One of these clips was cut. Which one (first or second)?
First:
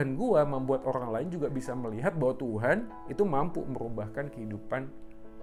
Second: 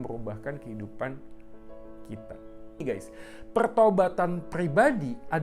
second